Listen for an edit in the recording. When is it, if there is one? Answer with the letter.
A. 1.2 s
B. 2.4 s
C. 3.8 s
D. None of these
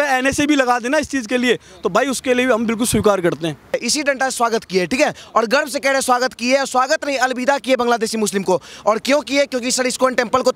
C